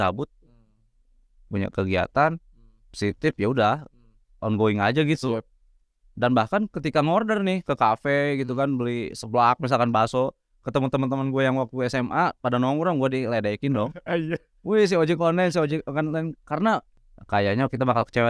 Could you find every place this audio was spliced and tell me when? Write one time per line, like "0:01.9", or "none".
0:16.9